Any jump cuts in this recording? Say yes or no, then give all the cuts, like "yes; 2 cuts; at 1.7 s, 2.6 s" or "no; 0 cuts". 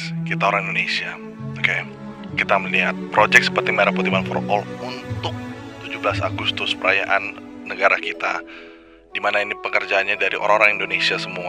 no; 0 cuts